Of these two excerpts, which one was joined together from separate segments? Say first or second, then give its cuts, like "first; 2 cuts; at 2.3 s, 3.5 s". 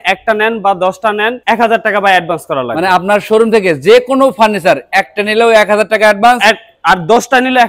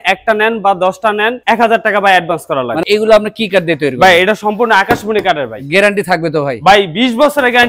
second; 1 cut; at 2.8 s